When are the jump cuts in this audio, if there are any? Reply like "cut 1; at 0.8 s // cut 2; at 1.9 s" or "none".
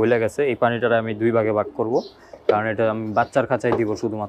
none